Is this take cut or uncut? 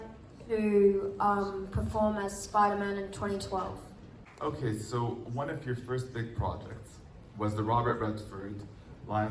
cut